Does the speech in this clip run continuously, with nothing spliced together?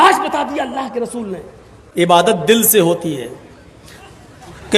no; 1 cut; at 1.2 s

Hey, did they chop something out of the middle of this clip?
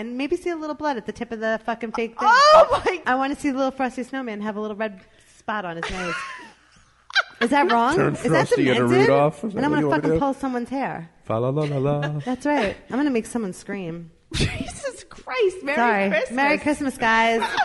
yes; 2 cuts; at 3.0 s, 11.1 s

